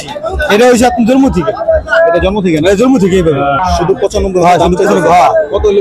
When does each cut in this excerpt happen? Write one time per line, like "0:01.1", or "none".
0:03.6